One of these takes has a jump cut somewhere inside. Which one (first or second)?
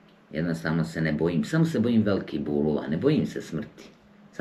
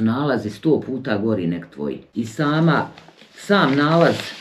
second